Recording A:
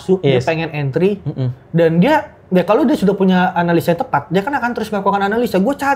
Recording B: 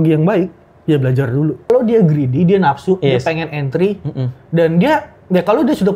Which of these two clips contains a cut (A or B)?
B